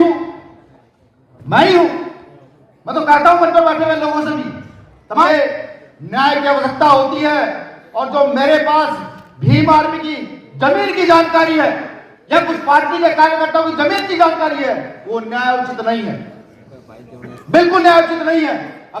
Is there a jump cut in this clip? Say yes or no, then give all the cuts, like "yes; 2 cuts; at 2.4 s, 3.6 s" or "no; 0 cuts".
yes; 1 cut; at 5.3 s